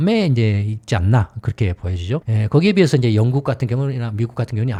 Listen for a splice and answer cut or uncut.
uncut